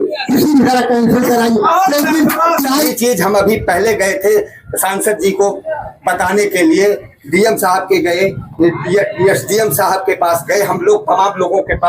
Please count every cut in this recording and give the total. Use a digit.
1